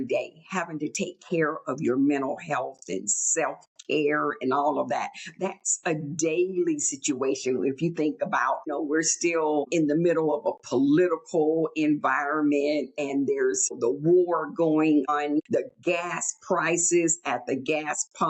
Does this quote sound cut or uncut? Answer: cut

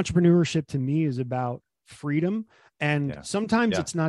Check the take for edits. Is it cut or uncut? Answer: uncut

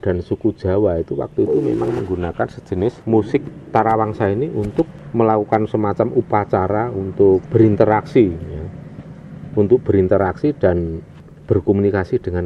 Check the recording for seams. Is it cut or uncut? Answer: uncut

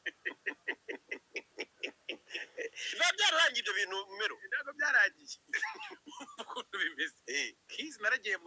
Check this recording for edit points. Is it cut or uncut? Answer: uncut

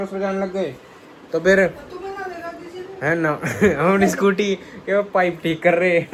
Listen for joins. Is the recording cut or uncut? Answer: uncut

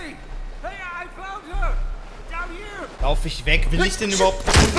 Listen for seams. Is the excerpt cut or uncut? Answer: uncut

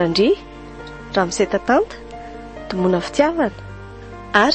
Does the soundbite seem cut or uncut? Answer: uncut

